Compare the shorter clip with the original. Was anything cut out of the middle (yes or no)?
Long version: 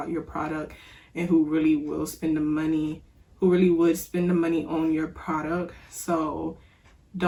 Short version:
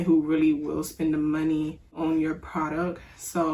yes